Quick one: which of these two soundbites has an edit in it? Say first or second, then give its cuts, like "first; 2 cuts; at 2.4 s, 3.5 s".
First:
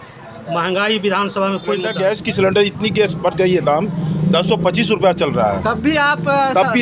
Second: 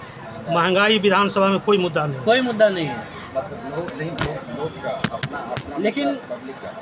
first; 1 cut; at 1.9 s